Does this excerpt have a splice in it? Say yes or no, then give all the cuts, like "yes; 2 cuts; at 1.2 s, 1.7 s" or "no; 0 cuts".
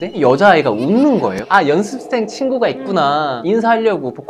yes; 2 cuts; at 1.4 s, 3.4 s